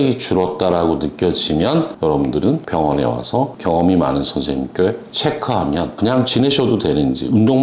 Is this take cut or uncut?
uncut